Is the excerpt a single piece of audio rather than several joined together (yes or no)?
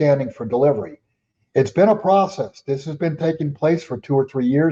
yes